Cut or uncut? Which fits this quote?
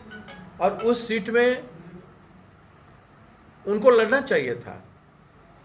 uncut